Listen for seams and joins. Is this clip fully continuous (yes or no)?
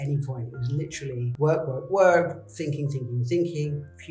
no